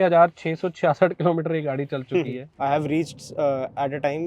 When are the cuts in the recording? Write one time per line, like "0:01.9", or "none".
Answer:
0:02.4